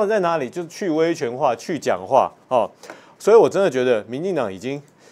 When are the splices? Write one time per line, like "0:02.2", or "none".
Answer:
none